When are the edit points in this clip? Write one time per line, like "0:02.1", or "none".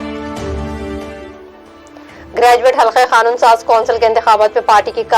0:01.0